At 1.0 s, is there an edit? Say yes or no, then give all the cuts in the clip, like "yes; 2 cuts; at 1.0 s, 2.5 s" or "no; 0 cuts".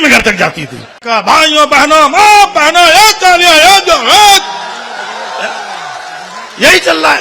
yes; 1 cut; at 1.0 s